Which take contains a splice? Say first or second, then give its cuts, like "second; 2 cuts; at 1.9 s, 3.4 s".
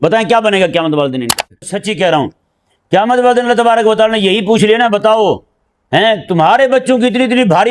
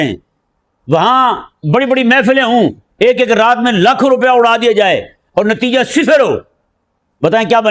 first; 1 cut; at 1.7 s